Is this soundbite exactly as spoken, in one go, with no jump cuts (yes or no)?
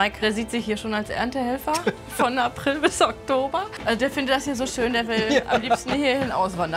no